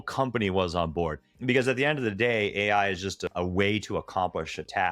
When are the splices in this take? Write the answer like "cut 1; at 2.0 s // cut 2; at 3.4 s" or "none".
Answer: cut 1; at 1.3 s // cut 2; at 3.3 s